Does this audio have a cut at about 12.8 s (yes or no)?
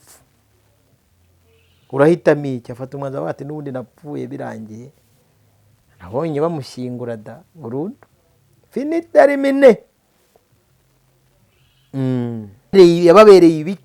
yes